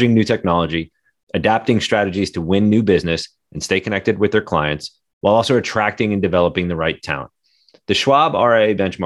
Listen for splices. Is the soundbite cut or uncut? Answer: uncut